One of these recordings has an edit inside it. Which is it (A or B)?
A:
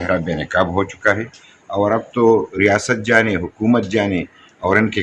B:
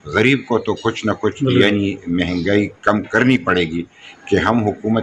B